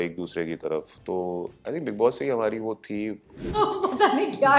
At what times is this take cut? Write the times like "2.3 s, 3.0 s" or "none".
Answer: 3.5 s